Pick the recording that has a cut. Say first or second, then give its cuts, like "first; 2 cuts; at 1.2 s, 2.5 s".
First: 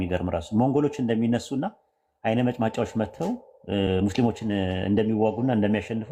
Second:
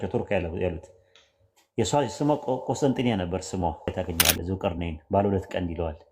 second; 1 cut; at 3.9 s